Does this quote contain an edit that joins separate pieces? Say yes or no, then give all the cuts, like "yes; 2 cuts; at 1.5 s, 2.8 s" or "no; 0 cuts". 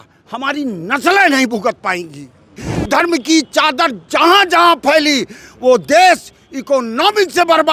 yes; 1 cut; at 2.7 s